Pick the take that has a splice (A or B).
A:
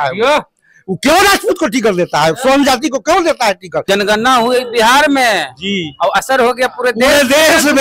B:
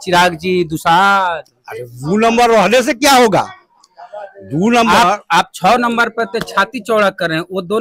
A